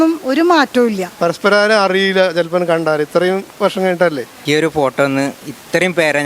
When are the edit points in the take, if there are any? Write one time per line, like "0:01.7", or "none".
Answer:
0:01.1
0:04.3